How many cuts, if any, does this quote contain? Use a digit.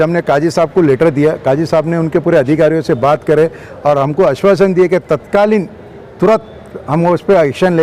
0